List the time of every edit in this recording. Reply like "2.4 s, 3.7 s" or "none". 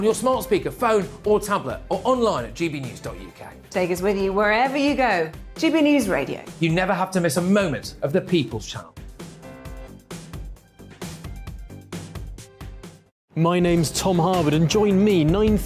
13.1 s